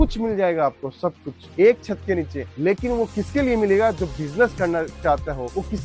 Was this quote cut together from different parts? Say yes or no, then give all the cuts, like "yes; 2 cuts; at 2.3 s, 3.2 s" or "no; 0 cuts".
no; 0 cuts